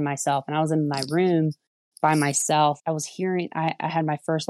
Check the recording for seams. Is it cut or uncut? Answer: cut